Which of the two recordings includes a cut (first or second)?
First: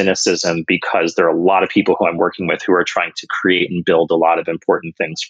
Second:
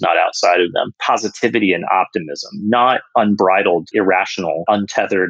second